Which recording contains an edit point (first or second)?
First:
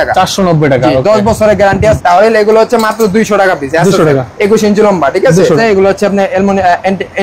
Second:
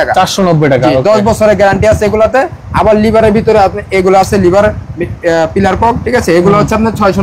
first